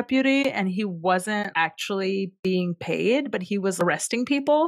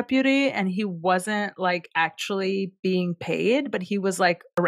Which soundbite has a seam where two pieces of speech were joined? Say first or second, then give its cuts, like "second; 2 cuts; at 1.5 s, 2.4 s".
first; 2 cuts; at 1.5 s, 3.8 s